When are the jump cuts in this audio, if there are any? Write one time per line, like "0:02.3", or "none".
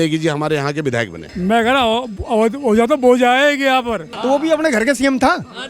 0:01.2
0:04.1